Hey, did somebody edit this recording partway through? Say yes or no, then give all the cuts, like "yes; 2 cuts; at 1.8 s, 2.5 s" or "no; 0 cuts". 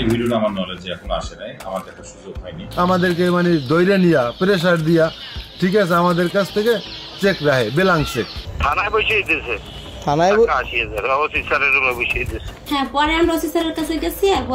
yes; 3 cuts; at 2.5 s, 8.5 s, 12.6 s